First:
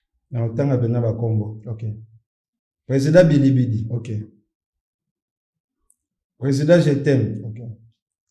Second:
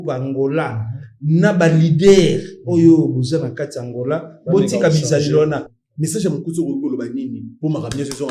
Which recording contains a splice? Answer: second; 1 cut; at 5.8 s

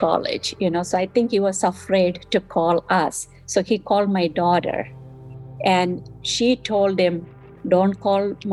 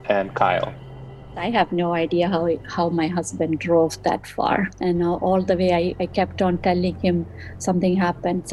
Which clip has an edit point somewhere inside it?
second; 2 cuts; at 1.4 s, 4.7 s

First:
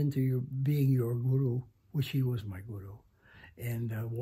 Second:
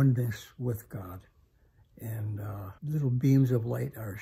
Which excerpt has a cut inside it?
second; 1 cut; at 2.7 s

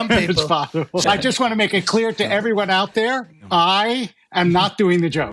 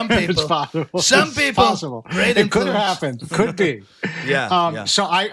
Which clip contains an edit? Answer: first; 2 cuts; at 1.0 s, 3.3 s

